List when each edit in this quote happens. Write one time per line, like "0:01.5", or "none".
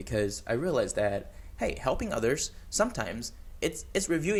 none